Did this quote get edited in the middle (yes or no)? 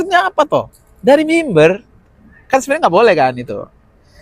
no